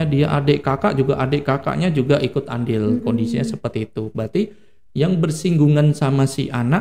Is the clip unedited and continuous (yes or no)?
yes